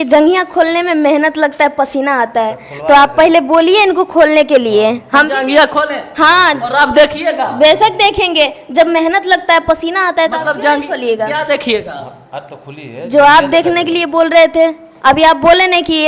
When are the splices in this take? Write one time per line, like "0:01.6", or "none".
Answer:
none